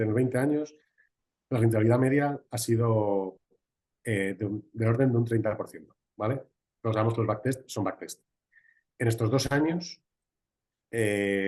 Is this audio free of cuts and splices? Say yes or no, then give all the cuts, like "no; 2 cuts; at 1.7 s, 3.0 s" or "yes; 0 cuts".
yes; 0 cuts